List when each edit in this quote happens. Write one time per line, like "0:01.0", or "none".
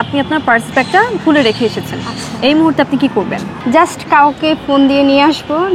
0:03.5